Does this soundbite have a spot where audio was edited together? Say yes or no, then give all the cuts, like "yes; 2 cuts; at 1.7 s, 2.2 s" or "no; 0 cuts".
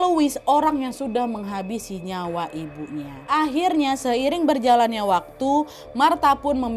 yes; 1 cut; at 3.1 s